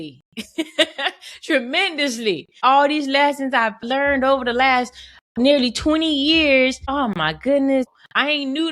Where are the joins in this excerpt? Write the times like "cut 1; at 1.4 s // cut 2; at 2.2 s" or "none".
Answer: cut 1; at 2.6 s // cut 2; at 3.8 s // cut 3; at 5.4 s // cut 4; at 7.1 s // cut 5; at 7.9 s